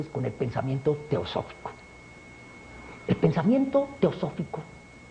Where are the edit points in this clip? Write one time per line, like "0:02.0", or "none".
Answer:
0:03.4